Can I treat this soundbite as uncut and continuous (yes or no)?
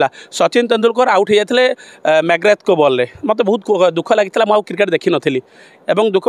yes